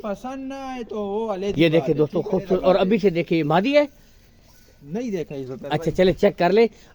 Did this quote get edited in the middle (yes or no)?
no